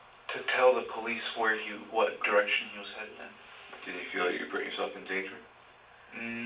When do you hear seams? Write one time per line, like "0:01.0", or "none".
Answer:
0:04.5

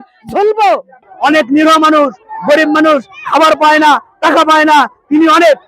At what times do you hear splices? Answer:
0:01.0

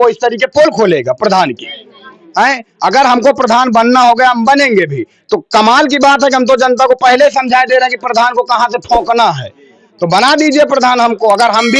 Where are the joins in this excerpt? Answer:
none

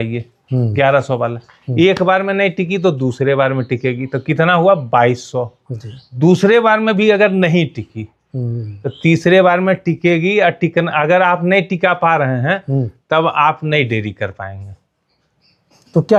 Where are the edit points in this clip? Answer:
none

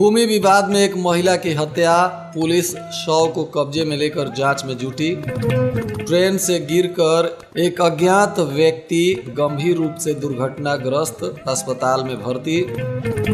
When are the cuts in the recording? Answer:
none

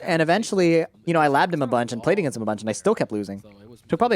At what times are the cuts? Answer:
0:01.0

